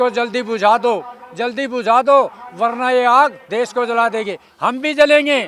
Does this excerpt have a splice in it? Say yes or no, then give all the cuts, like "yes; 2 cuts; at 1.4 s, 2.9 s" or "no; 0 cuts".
no; 0 cuts